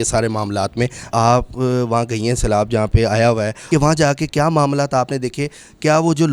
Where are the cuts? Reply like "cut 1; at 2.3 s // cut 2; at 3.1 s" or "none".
cut 1; at 1.0 s // cut 2; at 3.6 s